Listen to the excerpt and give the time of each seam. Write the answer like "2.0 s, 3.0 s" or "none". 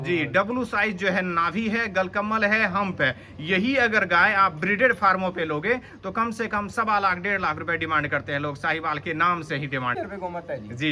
10.0 s